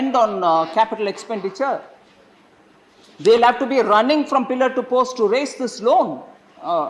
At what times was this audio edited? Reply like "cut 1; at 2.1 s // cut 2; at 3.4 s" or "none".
none